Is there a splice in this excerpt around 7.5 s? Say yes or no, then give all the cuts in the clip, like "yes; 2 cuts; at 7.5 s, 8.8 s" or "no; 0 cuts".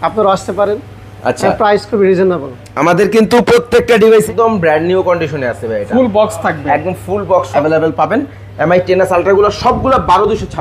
yes; 2 cuts; at 4.3 s, 7.5 s